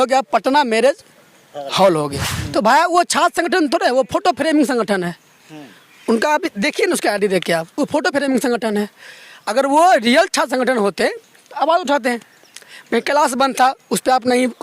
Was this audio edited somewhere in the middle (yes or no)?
yes